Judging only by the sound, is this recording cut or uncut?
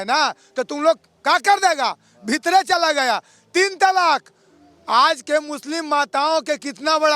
uncut